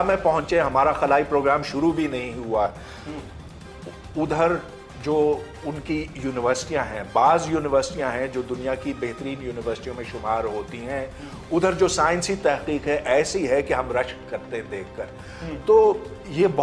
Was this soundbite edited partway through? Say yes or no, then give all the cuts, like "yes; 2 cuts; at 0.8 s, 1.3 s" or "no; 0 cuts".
no; 0 cuts